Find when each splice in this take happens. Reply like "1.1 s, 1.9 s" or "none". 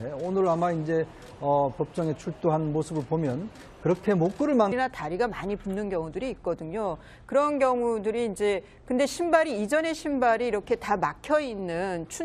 none